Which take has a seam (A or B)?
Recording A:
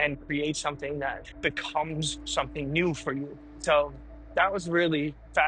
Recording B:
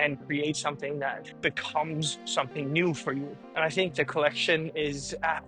B